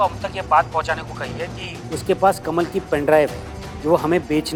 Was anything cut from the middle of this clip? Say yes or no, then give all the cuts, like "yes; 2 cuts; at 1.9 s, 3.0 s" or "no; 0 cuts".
no; 0 cuts